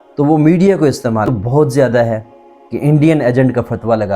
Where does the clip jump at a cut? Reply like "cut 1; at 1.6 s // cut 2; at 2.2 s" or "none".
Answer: cut 1; at 1.1 s